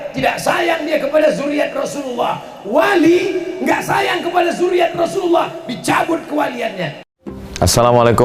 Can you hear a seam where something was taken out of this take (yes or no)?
yes